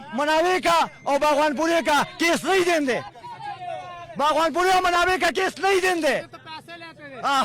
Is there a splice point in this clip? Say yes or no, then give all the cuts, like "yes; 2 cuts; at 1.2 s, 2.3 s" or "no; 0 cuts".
no; 0 cuts